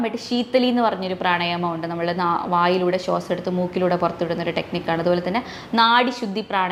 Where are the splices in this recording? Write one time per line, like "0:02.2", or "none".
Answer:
none